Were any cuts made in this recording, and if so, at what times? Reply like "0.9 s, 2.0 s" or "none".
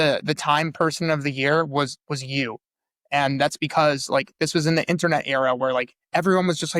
none